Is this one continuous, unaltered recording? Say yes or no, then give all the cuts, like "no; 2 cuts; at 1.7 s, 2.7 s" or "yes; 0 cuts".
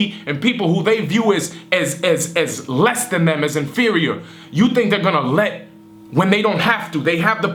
yes; 0 cuts